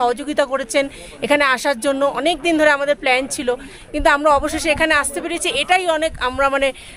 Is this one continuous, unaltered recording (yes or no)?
yes